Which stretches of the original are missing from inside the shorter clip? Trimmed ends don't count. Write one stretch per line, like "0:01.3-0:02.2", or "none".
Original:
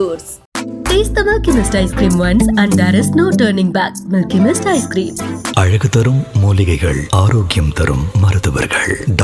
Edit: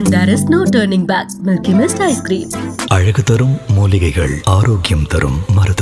none